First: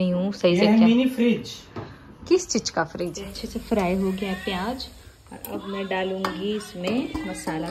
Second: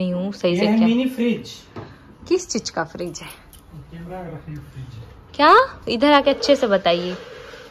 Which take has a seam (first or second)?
first